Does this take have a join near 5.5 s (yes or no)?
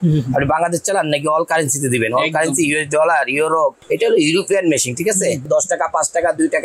yes